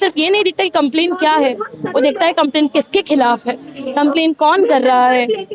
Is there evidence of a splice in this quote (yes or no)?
no